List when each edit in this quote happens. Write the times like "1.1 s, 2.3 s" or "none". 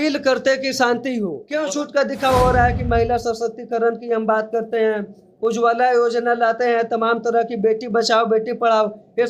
1.4 s